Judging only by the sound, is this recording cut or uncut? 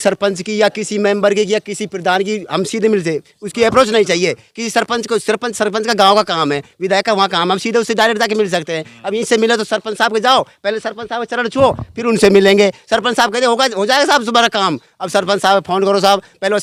uncut